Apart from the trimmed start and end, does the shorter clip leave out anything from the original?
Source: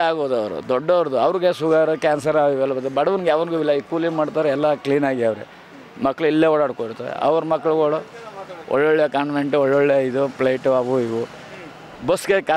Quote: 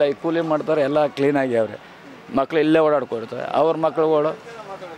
no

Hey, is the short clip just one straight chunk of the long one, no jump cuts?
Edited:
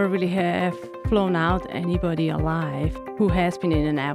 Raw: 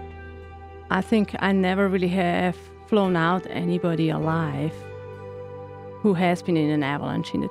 no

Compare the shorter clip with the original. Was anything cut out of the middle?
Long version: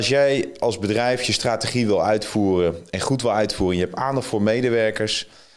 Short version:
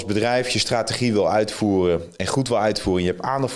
no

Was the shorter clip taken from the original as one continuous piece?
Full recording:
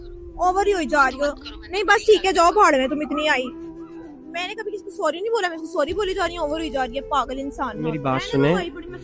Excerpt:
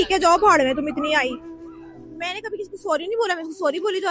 yes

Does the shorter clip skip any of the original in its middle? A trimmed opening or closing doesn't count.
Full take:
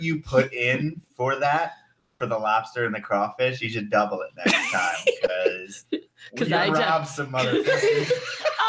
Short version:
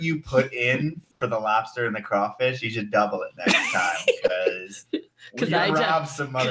yes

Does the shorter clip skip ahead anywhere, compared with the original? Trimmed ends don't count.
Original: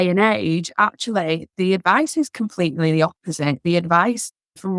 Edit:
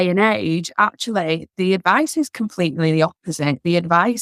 no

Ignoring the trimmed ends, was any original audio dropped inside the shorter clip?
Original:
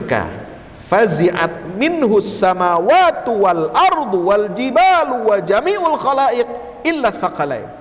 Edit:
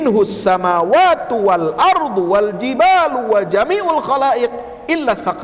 no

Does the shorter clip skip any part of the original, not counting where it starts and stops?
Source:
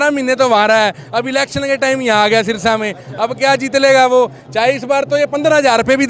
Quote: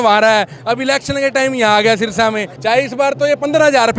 yes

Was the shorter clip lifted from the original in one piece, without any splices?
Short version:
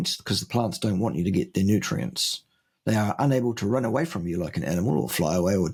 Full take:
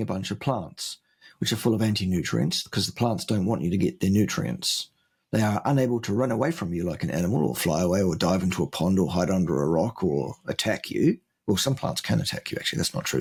yes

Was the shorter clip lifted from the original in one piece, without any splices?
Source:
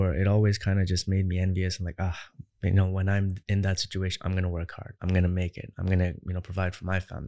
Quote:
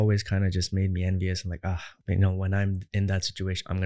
no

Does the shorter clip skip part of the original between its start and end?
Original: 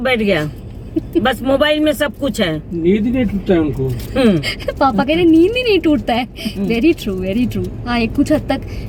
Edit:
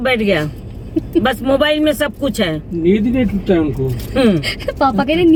no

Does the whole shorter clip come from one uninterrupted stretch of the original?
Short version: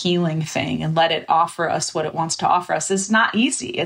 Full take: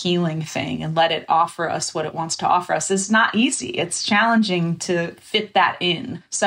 yes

